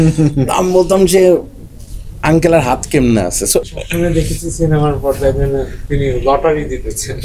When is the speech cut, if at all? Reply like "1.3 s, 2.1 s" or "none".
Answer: 3.7 s